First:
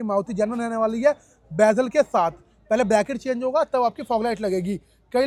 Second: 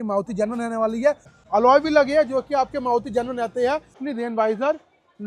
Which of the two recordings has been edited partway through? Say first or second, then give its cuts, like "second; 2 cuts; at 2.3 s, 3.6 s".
second; 2 cuts; at 1.3 s, 4.0 s